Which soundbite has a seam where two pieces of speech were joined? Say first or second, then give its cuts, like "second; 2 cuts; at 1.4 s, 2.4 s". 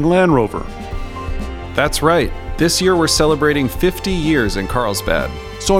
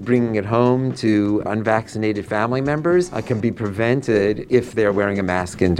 second; 3 cuts; at 1.5 s, 3.2 s, 4.4 s